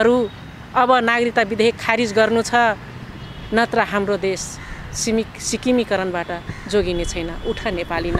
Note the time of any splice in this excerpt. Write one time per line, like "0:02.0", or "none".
none